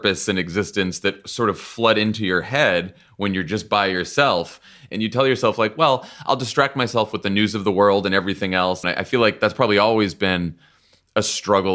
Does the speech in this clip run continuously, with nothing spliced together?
no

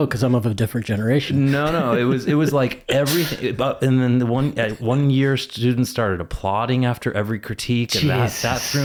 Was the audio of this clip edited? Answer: no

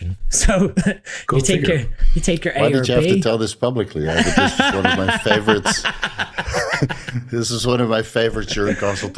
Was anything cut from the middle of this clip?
no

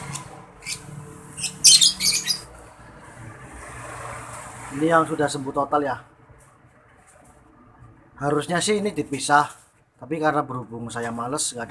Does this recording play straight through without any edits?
no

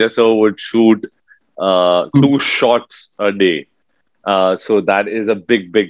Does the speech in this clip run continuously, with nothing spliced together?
yes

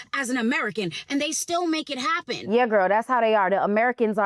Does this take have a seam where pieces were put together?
yes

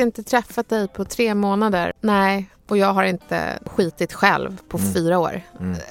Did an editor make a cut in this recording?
yes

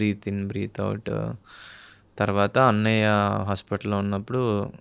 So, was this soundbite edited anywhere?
no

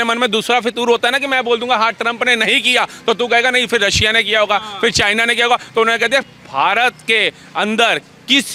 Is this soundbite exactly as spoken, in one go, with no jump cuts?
yes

